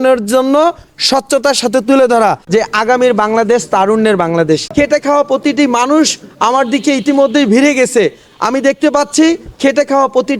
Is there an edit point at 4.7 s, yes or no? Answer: yes